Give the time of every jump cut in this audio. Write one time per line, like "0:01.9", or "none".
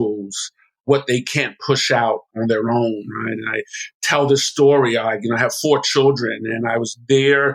0:00.8
0:02.3